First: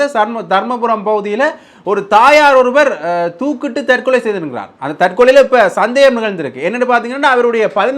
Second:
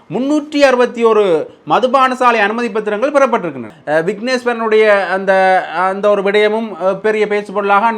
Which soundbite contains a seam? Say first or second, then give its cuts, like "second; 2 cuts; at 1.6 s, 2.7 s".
second; 1 cut; at 3.7 s